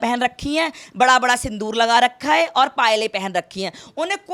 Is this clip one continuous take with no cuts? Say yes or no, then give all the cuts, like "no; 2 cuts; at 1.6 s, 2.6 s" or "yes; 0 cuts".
yes; 0 cuts